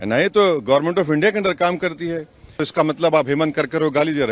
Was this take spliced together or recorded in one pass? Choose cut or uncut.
cut